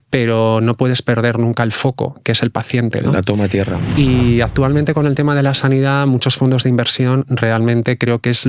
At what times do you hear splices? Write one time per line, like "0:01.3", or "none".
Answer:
0:03.8